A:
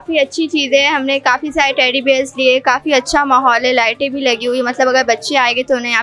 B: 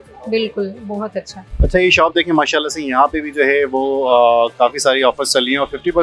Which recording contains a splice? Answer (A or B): B